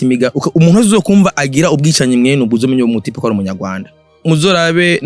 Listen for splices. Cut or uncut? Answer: cut